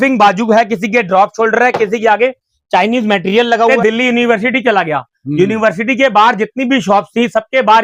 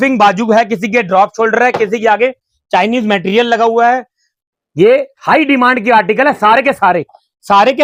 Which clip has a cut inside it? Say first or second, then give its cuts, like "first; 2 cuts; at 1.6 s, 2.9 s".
first; 1 cut; at 3.7 s